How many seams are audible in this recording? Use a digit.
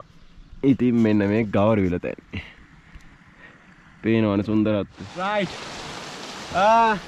1